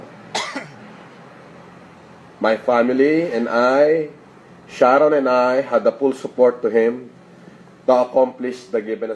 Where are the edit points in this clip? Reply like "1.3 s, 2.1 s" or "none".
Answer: 6.2 s